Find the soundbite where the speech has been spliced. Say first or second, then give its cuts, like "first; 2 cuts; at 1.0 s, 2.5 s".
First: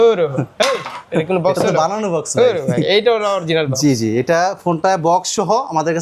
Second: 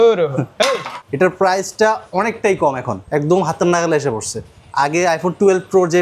second; 2 cuts; at 1.0 s, 2.9 s